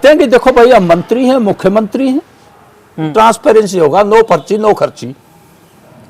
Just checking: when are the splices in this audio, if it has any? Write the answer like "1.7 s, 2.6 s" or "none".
3.1 s